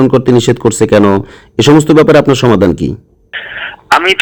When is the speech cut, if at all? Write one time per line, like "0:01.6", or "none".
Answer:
none